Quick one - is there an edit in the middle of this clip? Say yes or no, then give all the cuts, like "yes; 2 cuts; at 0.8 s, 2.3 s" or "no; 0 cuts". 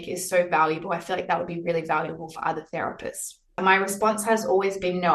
yes; 1 cut; at 3.5 s